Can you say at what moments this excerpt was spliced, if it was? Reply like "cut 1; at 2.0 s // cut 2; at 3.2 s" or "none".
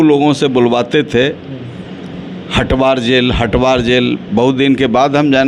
none